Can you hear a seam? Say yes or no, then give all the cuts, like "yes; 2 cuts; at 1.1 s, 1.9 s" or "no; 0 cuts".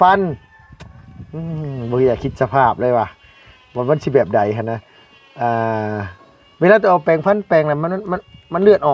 no; 0 cuts